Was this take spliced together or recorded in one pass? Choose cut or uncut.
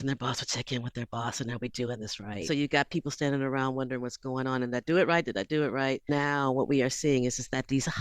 cut